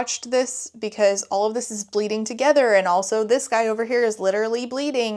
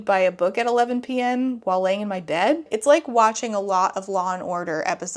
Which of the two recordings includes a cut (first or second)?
second